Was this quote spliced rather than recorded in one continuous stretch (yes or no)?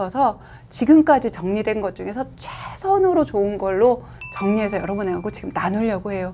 no